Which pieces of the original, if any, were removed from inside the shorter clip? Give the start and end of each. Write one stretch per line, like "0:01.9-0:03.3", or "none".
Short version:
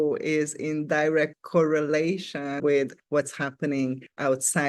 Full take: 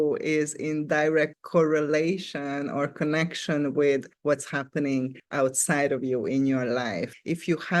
0:02.6-0:03.7